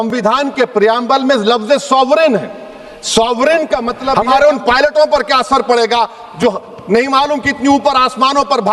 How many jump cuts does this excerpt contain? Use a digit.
1